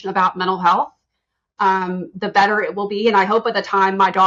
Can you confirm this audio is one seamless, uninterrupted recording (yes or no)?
yes